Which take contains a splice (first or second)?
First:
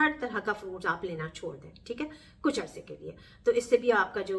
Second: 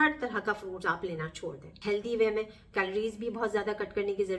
second